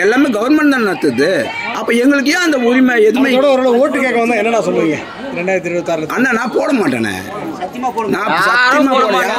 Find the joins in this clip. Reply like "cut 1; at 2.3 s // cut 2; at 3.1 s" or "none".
cut 1; at 1.7 s